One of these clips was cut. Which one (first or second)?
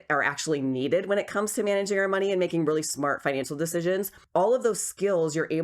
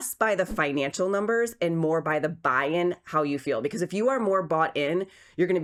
first